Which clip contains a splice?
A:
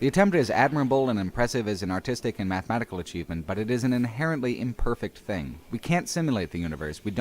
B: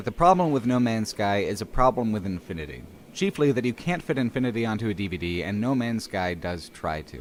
A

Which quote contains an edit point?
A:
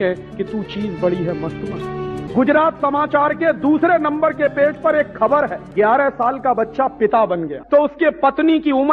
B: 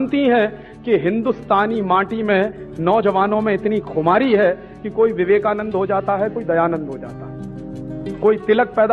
A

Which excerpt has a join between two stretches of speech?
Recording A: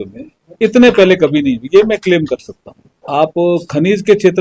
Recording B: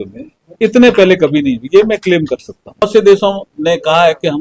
B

